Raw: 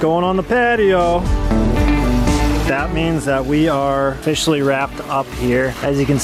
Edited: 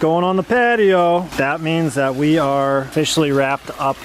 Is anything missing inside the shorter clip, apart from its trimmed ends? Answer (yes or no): yes